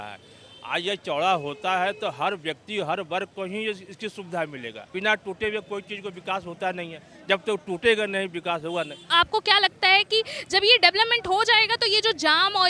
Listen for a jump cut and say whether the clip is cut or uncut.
cut